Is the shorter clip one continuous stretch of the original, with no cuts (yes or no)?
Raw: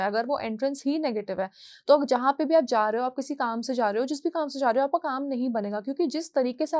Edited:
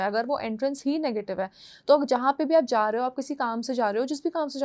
yes